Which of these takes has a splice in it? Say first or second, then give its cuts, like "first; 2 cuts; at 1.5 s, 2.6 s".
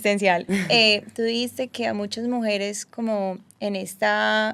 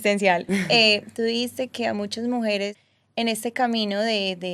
second; 1 cut; at 2.8 s